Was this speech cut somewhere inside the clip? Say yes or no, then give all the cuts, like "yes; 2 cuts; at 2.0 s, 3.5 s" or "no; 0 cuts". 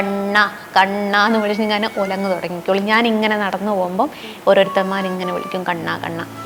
no; 0 cuts